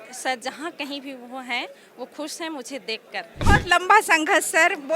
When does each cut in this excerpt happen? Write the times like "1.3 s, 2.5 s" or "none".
3.4 s